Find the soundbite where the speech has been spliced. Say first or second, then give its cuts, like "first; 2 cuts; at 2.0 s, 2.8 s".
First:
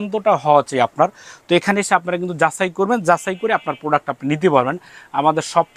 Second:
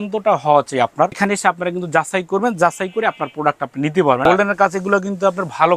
second; 2 cuts; at 1.2 s, 4.2 s